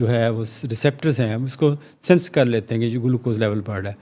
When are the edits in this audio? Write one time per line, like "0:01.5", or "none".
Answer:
none